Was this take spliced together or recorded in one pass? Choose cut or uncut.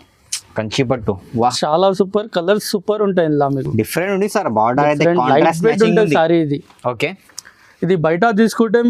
uncut